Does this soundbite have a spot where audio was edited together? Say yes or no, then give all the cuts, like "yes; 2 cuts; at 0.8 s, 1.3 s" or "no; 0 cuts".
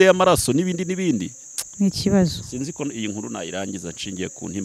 yes; 1 cut; at 1.4 s